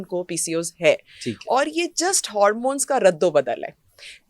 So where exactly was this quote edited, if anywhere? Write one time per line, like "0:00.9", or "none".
none